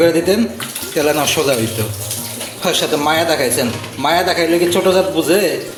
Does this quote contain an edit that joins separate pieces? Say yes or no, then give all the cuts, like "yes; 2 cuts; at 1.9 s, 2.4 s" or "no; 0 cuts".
no; 0 cuts